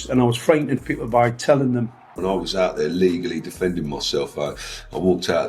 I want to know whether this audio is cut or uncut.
cut